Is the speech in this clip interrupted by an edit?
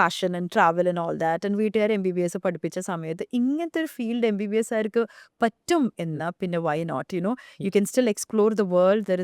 no; 0 cuts

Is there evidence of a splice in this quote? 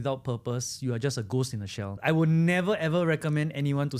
yes; 1 cut; at 1.9 s

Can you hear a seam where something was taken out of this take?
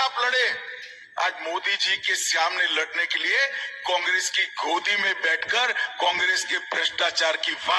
no; 0 cuts

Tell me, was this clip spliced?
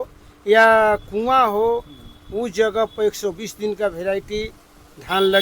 no; 0 cuts

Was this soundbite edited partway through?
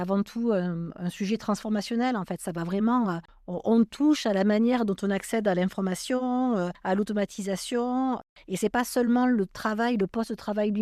no; 0 cuts

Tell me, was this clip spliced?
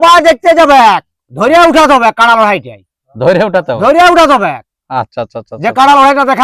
no; 0 cuts

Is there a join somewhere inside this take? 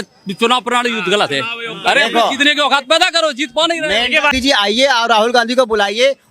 yes; 1 cut; at 4.3 s

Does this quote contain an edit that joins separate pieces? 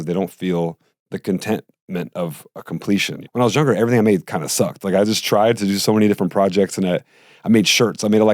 yes; 2 cuts; at 0.9 s, 3.2 s

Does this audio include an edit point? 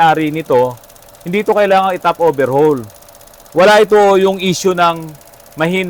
no; 0 cuts

